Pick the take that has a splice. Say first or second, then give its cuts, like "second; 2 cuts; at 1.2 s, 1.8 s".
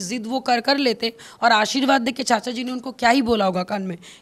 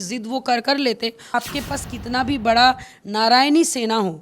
second; 1 cut; at 1.2 s